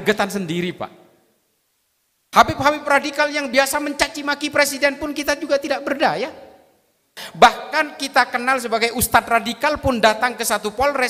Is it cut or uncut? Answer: cut